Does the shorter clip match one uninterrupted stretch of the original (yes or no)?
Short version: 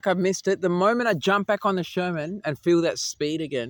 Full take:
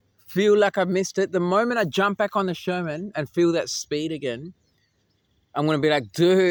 yes